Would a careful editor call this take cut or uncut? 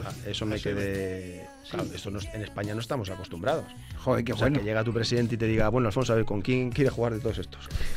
uncut